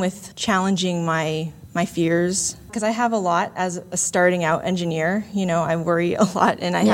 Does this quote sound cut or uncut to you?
cut